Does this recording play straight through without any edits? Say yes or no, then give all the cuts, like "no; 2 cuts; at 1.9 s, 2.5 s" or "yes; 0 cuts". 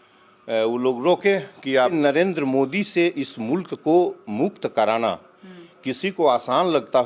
no; 1 cut; at 1.9 s